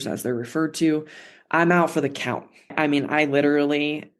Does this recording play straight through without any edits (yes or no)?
no